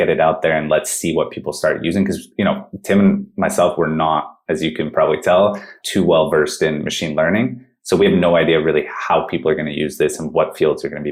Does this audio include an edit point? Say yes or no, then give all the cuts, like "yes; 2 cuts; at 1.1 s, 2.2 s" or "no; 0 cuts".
no; 0 cuts